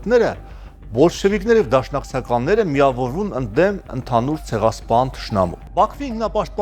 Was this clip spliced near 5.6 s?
yes; 1 cut; at 5.6 s

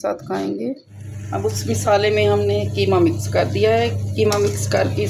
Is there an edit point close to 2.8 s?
no; 1 cut; at 1.1 s

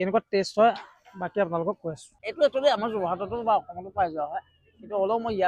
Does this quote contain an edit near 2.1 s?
yes; 1 cut; at 2.1 s

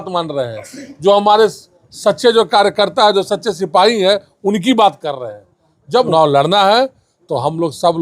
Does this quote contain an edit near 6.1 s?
yes; 1 cut; at 6.1 s

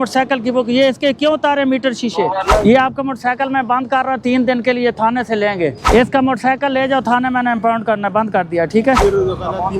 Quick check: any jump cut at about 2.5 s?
yes; 3 cuts; at 2.5 s, 5.8 s, 9.0 s

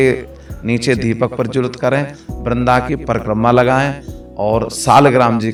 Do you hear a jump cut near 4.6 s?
no; 0 cuts

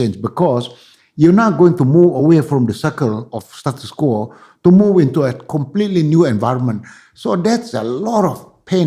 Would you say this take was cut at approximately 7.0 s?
no; 0 cuts

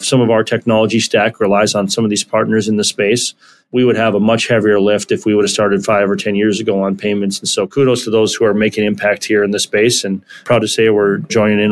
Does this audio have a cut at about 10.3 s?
yes; 1 cut; at 10.3 s

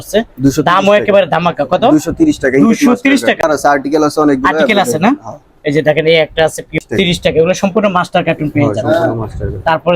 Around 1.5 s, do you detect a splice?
no; 2 cuts; at 3.4 s, 6.8 s

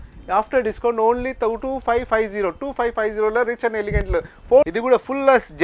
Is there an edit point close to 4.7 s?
yes; 1 cut; at 4.7 s

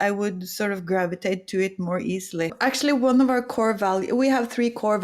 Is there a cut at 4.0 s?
no; 1 cut; at 2.5 s

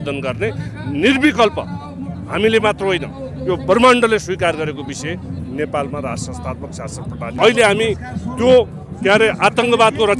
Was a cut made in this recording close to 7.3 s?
yes; 1 cut; at 7.3 s

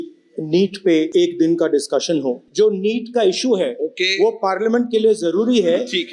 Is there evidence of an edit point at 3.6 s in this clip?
no; 2 cuts; at 1.1 s, 2.4 s

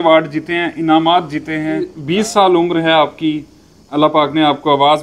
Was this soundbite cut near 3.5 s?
no; 1 cut; at 2.0 s

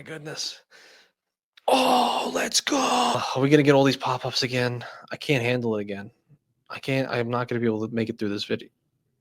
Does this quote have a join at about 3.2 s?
yes; 1 cut; at 3.2 s

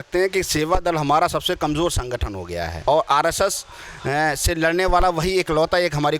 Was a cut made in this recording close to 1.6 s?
no; 1 cut; at 2.9 s

